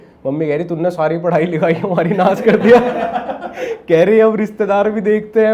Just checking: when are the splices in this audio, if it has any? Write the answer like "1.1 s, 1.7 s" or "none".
none